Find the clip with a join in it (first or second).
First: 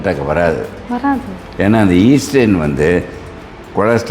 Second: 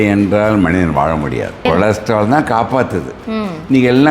second